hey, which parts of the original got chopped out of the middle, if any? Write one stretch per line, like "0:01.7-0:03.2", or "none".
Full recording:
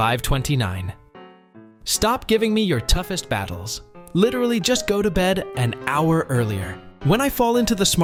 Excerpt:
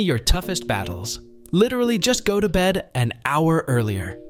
none

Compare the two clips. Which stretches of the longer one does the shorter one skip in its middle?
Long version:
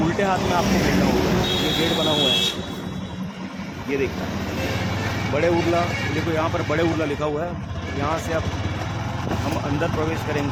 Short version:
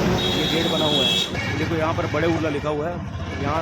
0:02.6-0:05.9

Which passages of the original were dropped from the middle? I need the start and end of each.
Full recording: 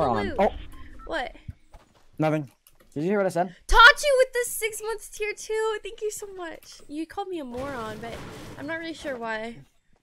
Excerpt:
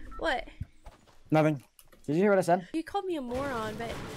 0:03.6-0:06.9

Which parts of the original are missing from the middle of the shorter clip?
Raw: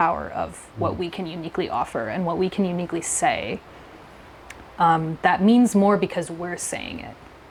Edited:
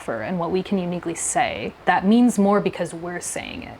0:03.6-0:05.1

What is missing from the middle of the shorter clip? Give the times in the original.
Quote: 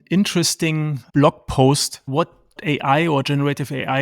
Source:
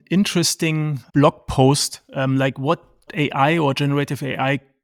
0:02.1-0:02.6

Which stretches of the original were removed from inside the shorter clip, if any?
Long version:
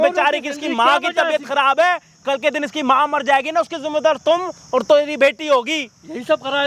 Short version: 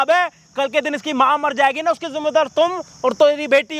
none

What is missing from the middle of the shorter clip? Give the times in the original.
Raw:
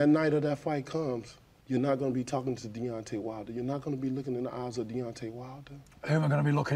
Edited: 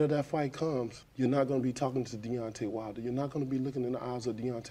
0:01.3-0:01.5

